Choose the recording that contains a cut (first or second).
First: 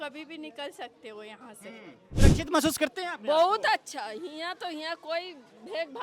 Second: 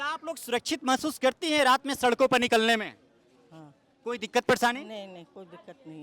first